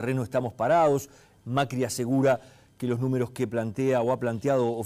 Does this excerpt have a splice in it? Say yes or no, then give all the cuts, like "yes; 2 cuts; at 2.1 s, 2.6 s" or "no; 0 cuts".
yes; 1 cut; at 2.2 s